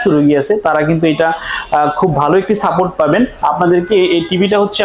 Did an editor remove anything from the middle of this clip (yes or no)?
yes